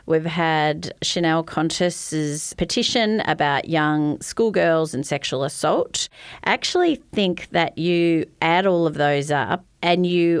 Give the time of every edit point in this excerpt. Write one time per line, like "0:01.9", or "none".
0:06.3